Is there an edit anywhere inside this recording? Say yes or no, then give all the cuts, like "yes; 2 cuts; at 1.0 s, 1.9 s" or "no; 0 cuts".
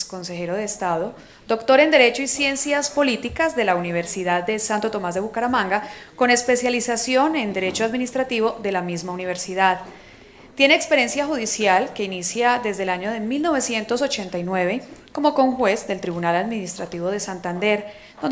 yes; 1 cut; at 16.8 s